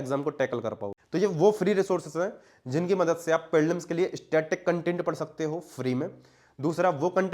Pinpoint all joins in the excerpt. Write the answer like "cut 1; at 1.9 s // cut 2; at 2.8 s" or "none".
cut 1; at 0.9 s